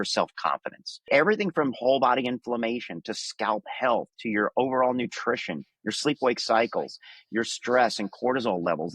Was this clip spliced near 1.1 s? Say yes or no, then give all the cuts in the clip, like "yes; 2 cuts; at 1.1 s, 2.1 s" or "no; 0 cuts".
yes; 1 cut; at 1.1 s